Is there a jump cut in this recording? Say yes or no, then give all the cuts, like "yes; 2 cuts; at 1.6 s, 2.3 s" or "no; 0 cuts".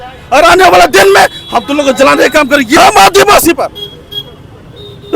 yes; 1 cut; at 2.8 s